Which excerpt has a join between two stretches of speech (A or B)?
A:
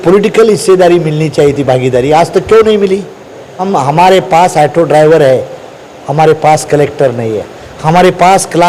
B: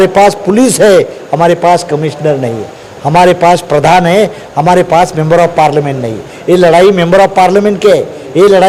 A